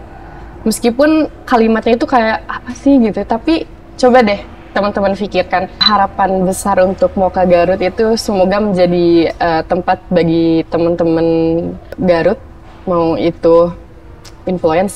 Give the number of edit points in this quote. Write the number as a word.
two